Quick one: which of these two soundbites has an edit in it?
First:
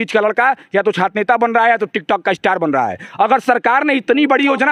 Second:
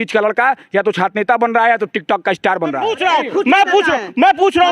second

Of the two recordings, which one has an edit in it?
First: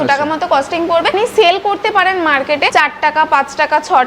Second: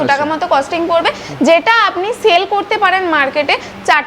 first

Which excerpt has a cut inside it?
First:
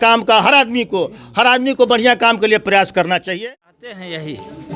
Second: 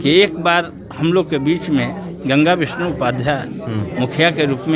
first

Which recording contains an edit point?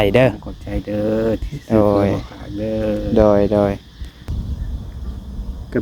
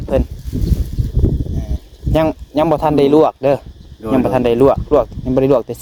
first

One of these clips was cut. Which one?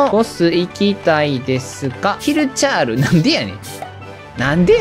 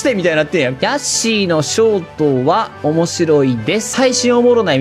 second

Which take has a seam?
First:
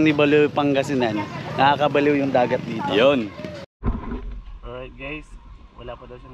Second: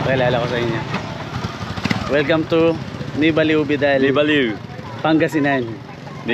first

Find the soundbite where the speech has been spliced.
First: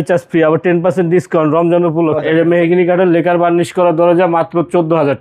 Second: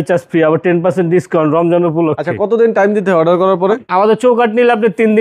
first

